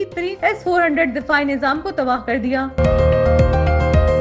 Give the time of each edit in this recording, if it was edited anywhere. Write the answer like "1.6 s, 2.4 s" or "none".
2.8 s